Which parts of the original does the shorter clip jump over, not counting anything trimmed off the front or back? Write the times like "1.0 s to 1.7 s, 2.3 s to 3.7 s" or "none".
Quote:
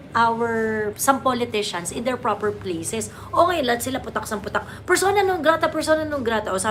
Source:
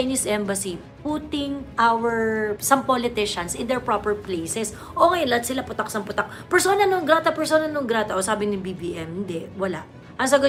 none